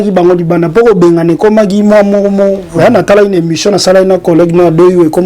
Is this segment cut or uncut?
uncut